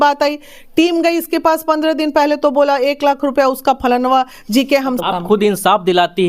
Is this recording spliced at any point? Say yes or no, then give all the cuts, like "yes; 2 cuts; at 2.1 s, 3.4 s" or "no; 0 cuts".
yes; 1 cut; at 5.0 s